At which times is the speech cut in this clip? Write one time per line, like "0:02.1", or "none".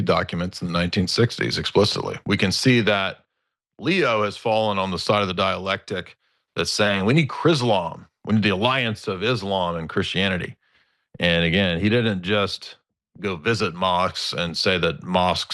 0:02.2